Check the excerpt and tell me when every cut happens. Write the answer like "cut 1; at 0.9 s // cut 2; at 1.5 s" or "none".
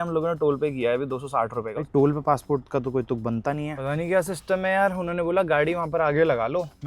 cut 1; at 1.8 s // cut 2; at 3.7 s